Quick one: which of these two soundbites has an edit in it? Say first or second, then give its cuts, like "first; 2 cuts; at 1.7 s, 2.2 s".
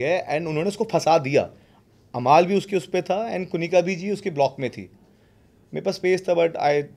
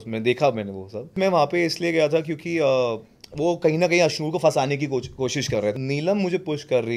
second; 2 cuts; at 1.2 s, 5.8 s